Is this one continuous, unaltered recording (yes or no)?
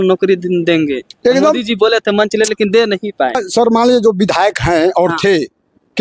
no